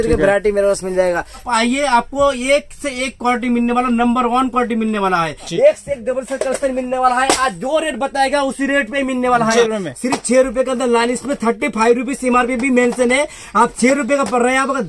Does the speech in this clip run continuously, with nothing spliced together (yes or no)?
no